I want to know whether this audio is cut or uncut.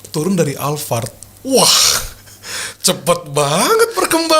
uncut